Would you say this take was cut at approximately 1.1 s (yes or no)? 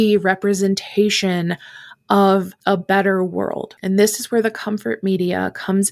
no